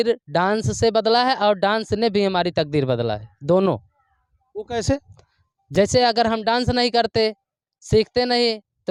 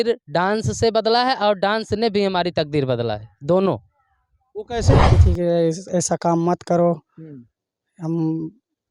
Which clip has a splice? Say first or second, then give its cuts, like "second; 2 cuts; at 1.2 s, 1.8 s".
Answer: second; 1 cut; at 5.2 s